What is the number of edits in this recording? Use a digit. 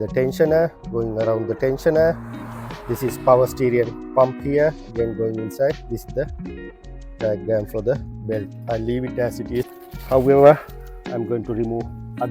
1